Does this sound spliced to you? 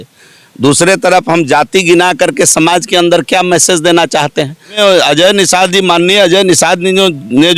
yes; 1 cut; at 4.8 s

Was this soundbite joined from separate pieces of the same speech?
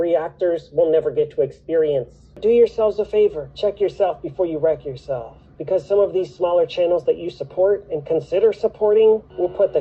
yes; 1 cut; at 2.4 s

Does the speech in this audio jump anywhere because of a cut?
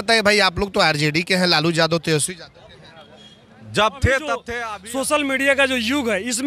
yes; 1 cut; at 4.6 s

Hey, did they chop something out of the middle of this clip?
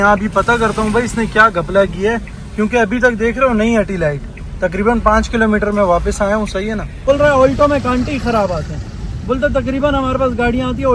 yes; 1 cut; at 7.1 s

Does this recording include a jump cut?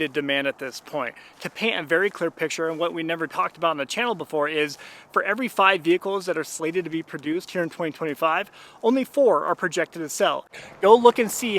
yes; 1 cut; at 10.6 s

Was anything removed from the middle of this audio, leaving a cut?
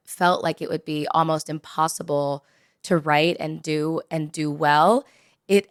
no; 0 cuts

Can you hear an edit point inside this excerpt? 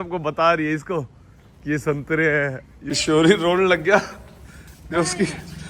yes; 1 cut; at 2.7 s

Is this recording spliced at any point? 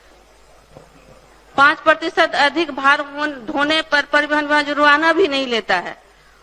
no; 0 cuts

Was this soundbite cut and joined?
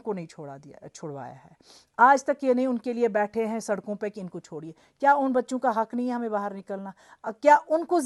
no; 0 cuts

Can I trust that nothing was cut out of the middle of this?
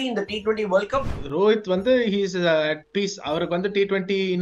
no; 1 cut; at 1.2 s

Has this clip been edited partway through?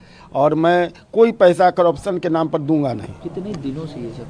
no; 0 cuts

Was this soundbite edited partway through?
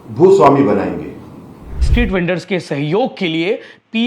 yes; 1 cut; at 1.9 s

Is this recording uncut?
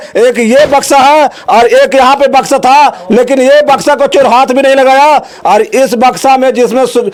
yes; 0 cuts

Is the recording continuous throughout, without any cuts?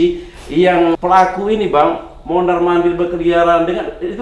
no; 1 cut; at 1.0 s

